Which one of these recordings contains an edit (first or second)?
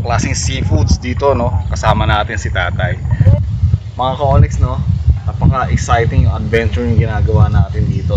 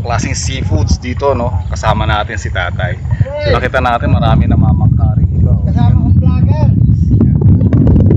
first